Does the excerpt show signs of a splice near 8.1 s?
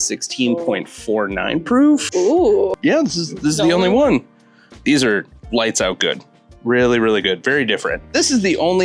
yes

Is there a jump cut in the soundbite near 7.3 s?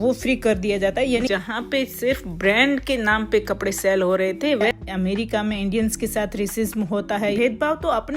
yes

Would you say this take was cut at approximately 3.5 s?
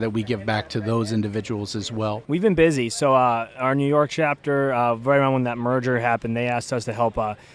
no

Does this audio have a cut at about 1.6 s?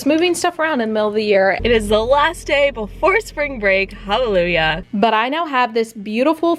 yes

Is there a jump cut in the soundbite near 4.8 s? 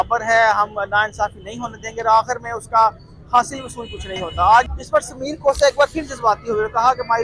yes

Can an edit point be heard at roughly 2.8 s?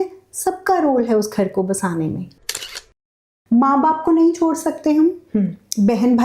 yes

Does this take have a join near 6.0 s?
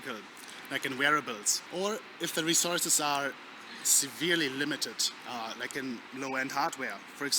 no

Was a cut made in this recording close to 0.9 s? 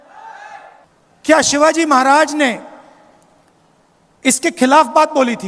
yes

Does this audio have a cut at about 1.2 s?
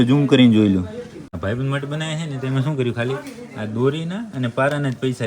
yes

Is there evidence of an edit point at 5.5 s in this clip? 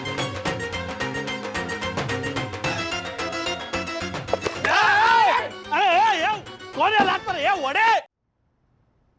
no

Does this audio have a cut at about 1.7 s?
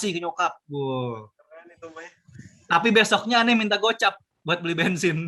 no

